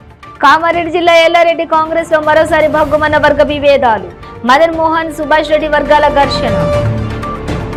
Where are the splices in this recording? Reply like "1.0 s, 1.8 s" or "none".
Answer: none